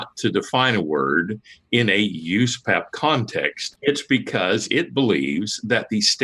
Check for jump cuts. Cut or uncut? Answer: cut